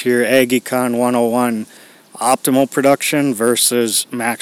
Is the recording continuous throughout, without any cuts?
yes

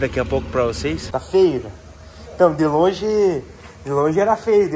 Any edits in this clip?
yes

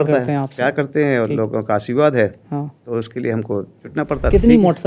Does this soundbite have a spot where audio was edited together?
no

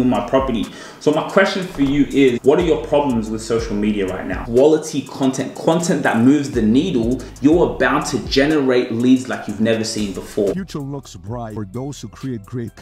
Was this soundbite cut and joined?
yes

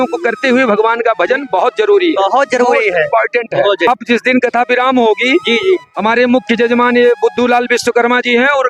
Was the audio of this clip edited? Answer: yes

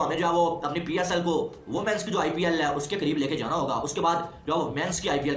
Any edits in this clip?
no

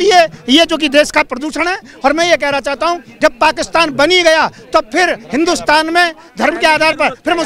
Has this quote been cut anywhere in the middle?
no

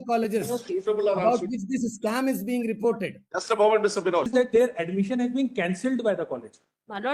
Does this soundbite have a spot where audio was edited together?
yes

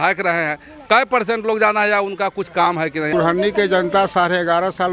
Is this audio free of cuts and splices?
no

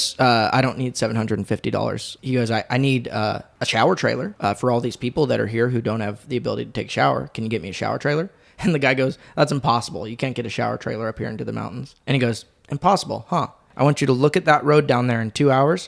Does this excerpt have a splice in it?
yes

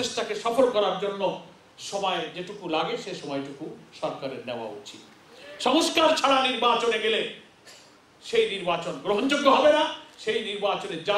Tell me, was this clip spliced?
no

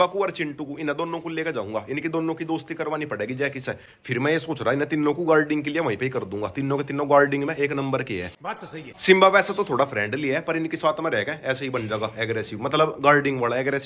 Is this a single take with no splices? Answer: yes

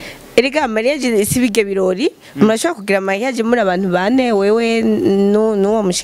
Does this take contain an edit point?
no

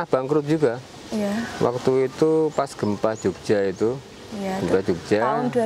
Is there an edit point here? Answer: no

